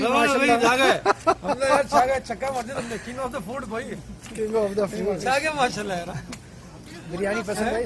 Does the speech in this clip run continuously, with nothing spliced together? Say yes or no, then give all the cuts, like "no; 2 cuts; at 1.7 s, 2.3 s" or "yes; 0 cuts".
yes; 0 cuts